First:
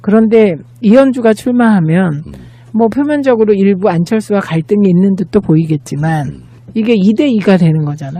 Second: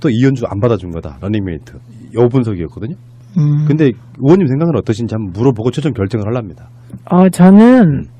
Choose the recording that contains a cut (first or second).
first